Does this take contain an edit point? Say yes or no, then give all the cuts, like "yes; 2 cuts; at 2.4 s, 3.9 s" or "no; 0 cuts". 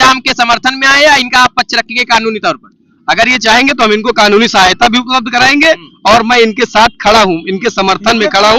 no; 0 cuts